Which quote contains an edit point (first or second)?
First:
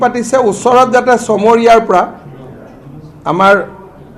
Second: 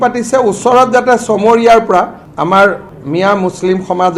second